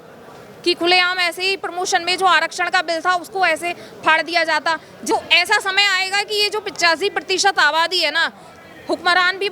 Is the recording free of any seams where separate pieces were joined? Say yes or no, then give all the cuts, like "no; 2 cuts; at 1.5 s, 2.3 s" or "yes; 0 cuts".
no; 1 cut; at 5.1 s